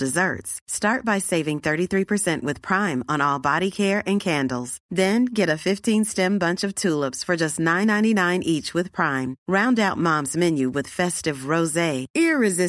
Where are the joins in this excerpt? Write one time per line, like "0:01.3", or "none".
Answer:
none